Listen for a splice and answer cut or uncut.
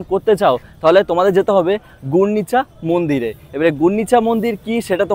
uncut